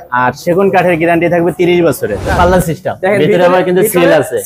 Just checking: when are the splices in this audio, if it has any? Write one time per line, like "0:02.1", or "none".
0:02.3